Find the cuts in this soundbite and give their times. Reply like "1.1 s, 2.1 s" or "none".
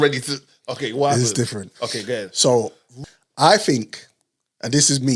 2.8 s